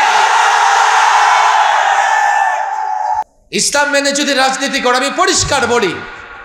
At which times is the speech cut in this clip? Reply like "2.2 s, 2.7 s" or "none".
3.2 s